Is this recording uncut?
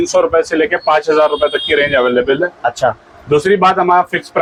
yes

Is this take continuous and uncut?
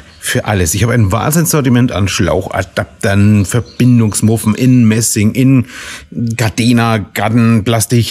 yes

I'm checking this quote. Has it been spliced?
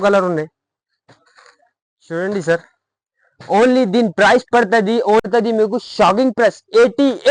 yes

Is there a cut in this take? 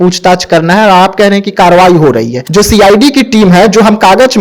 yes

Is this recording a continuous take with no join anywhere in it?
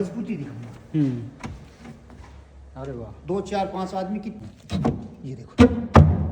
no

